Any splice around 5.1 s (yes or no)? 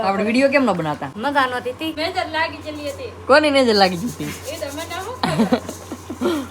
no